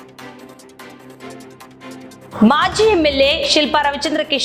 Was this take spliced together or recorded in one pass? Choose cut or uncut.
cut